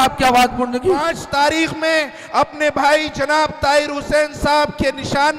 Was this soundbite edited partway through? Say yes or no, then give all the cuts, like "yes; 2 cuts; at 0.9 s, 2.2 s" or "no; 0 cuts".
yes; 1 cut; at 1.2 s